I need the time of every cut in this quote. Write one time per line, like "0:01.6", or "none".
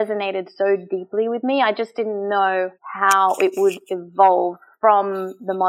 0:02.8